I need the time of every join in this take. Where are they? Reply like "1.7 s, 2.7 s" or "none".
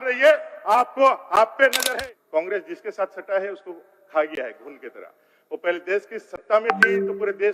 1.9 s